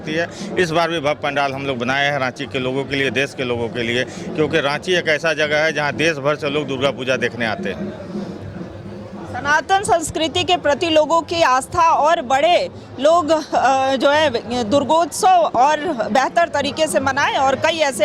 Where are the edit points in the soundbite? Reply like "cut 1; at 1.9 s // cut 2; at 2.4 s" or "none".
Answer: none